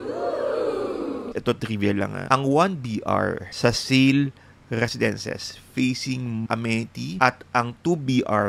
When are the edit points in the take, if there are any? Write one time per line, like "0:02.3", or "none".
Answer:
0:01.3
0:02.2
0:03.4
0:06.5